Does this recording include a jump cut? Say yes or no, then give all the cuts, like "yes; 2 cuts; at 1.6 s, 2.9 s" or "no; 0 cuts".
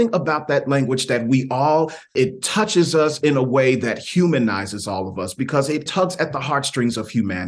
yes; 2 cuts; at 2.1 s, 5.9 s